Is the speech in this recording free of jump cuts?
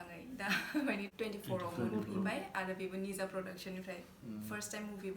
no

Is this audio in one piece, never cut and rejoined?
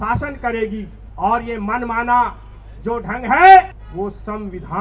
no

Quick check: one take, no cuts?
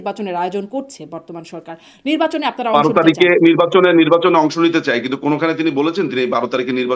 yes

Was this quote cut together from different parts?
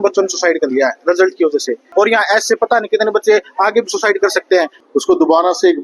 yes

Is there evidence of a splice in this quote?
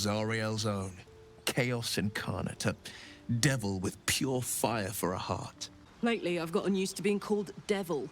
yes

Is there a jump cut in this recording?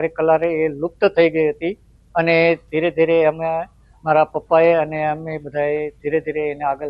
no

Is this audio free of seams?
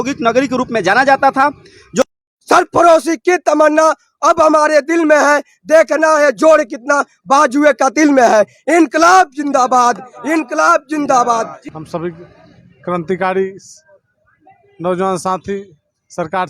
no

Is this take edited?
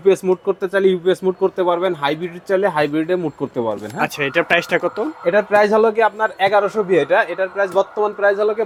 no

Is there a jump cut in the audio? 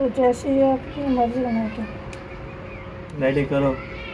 yes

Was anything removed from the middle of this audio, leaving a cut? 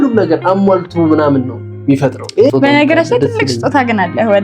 yes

